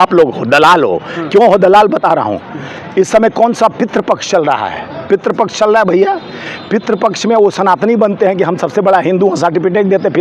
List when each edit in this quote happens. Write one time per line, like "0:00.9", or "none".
none